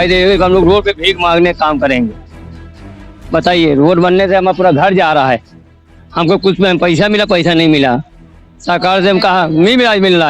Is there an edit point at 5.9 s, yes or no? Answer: no